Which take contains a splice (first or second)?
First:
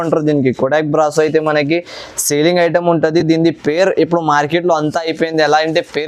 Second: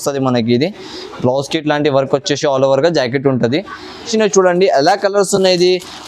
second